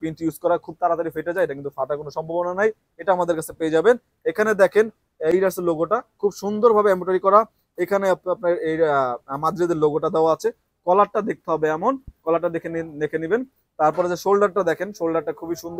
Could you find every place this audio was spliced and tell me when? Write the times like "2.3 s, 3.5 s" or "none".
none